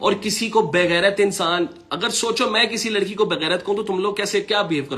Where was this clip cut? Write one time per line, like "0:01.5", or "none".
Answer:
none